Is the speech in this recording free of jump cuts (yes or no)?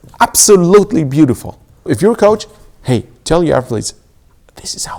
no